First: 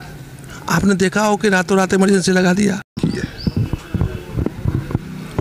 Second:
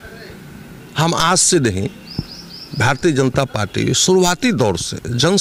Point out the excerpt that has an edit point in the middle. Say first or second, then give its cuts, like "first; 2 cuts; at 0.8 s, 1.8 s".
first; 1 cut; at 2.9 s